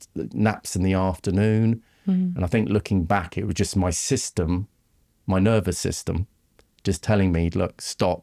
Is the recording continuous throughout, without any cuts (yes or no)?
yes